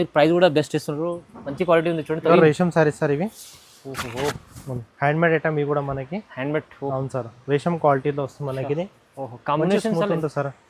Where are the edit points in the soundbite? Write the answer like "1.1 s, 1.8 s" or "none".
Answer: 2.3 s